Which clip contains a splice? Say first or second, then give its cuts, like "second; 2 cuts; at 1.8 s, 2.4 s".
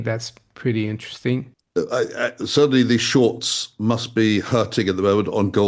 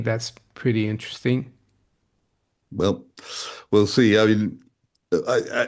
first; 1 cut; at 1.6 s